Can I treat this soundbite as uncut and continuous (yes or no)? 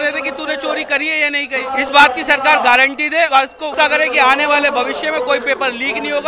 no